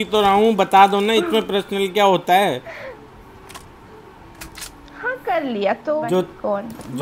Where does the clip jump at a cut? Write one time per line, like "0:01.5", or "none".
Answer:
0:06.0